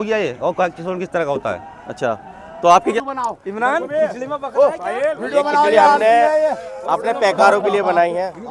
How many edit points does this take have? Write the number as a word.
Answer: one